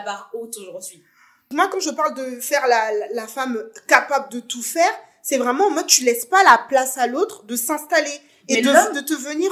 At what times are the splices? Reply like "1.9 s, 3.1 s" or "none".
1.4 s